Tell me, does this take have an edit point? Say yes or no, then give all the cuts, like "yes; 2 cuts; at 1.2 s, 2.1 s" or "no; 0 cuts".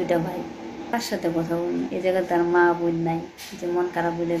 yes; 1 cut; at 0.9 s